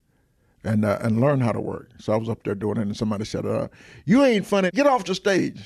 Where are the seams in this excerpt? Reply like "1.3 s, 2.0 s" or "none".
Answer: 4.7 s